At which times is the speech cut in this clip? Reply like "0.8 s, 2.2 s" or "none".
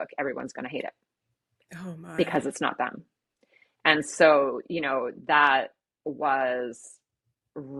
none